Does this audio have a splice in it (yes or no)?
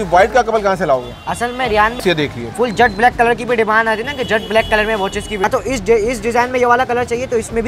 yes